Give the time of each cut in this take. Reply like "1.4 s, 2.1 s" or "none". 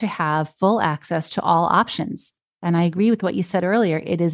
none